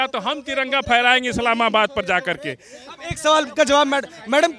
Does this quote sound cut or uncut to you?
uncut